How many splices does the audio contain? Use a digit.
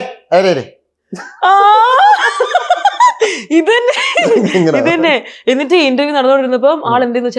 0